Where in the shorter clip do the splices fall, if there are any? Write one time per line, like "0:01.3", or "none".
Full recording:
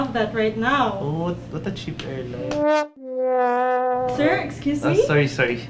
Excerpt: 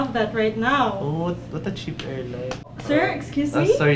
0:02.6